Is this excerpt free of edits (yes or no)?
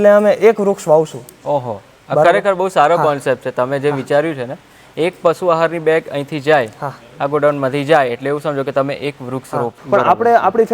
no